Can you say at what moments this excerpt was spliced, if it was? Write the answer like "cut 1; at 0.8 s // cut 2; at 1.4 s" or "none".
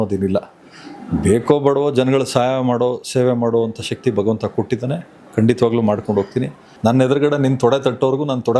cut 1; at 6.6 s